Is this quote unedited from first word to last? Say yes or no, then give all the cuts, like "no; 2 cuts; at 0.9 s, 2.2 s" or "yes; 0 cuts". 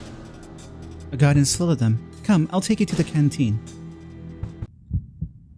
no; 1 cut; at 4.7 s